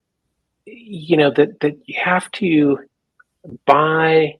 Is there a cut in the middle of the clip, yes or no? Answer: no